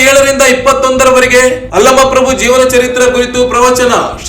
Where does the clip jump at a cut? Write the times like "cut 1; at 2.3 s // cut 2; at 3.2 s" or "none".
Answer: none